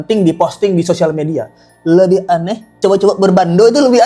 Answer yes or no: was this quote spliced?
no